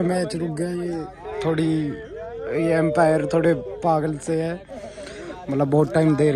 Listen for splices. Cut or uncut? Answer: uncut